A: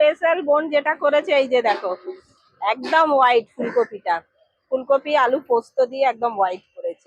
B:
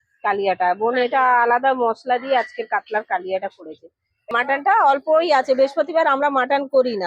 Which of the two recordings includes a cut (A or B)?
B